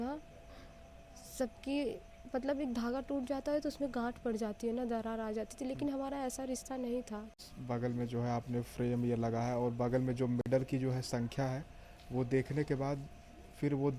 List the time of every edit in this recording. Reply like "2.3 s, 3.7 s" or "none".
7.3 s